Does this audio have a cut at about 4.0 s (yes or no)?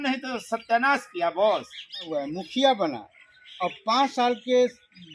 no